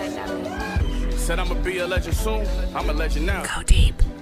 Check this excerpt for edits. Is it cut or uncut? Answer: uncut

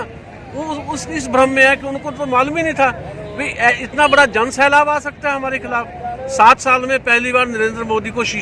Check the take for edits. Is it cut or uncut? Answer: uncut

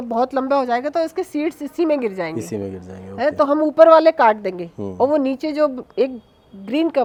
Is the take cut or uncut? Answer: uncut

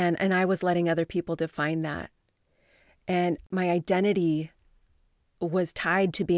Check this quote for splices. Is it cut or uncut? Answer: cut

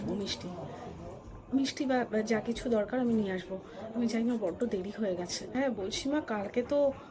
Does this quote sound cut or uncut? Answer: cut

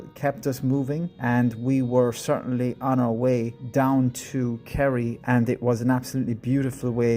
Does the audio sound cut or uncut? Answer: cut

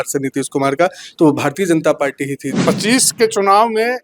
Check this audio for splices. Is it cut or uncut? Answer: cut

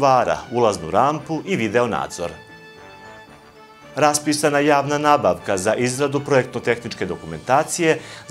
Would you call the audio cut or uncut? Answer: cut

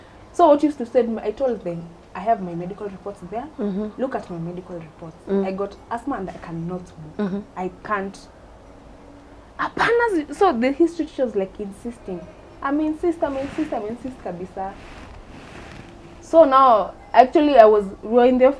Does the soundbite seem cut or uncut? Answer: uncut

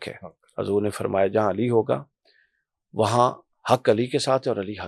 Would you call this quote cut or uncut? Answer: uncut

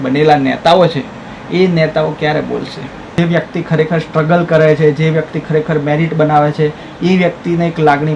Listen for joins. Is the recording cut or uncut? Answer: cut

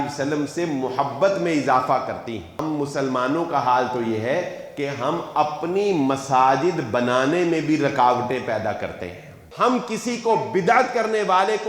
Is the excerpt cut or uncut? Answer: cut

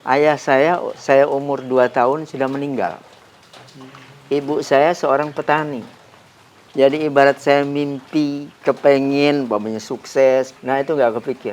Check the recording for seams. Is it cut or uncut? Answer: cut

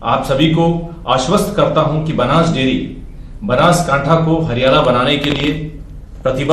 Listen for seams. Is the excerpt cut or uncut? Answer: cut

